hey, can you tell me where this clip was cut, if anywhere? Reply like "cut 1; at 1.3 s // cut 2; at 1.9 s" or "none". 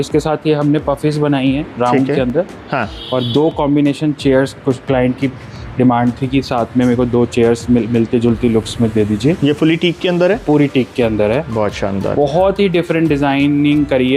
none